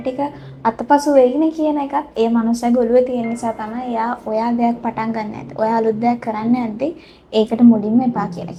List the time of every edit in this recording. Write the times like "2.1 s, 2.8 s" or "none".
none